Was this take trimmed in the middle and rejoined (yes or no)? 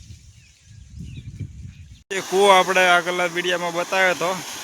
yes